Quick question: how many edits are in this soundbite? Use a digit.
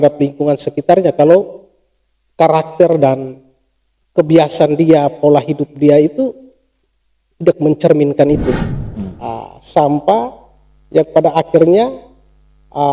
1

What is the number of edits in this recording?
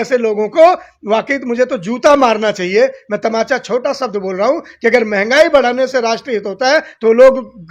0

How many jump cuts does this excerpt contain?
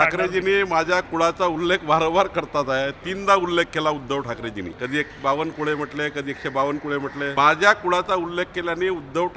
2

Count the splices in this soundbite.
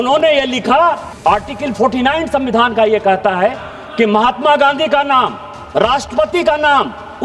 1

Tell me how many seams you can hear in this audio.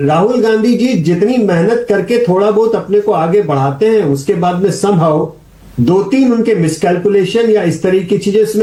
0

